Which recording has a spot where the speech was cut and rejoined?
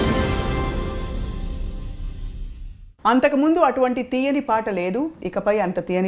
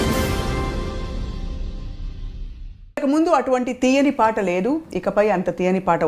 second; 1 cut; at 3.0 s

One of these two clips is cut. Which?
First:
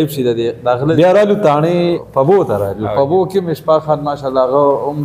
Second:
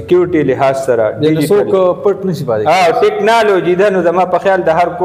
first; 2 cuts; at 1.0 s, 2.0 s

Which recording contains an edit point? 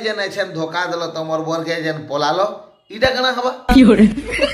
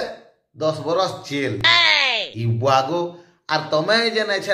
first; 1 cut; at 3.6 s

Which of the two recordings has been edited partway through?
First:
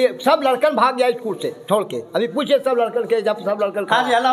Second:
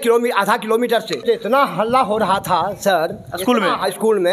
second; 1 cut; at 1.2 s

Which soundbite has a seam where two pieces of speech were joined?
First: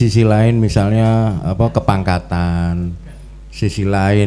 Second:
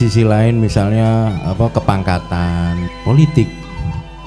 second; 1 cut; at 2.9 s

